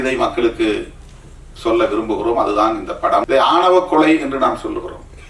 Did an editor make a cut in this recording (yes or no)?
yes